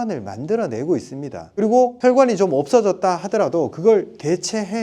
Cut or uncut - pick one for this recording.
cut